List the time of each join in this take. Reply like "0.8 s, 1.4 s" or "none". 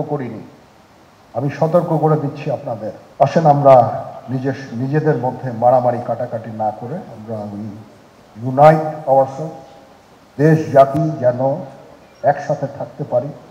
3.0 s